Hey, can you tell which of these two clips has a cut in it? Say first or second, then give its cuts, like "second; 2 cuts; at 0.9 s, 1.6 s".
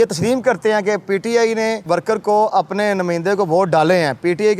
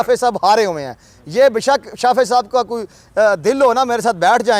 first; 1 cut; at 1.8 s